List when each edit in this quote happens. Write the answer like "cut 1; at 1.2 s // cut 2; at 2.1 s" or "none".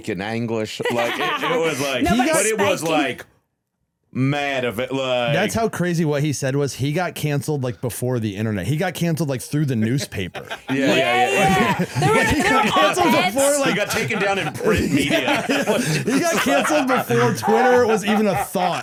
none

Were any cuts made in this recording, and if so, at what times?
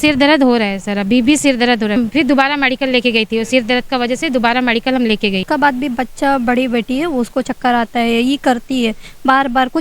cut 1; at 2.0 s // cut 2; at 5.4 s

